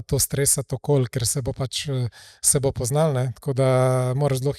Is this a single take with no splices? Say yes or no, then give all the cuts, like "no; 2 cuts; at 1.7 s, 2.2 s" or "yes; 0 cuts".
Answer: yes; 0 cuts